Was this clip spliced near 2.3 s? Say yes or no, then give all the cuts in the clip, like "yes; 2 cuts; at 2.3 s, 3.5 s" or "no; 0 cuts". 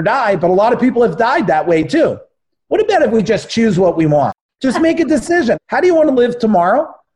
no; 2 cuts; at 4.4 s, 5.6 s